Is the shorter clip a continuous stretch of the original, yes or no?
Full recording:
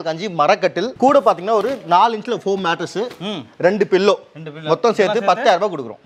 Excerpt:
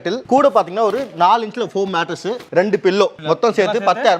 no